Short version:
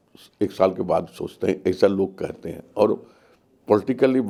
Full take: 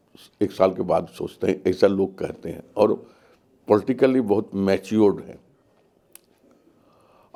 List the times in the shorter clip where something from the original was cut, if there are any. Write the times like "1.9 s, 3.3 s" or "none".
none